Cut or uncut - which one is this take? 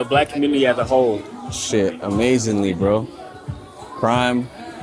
uncut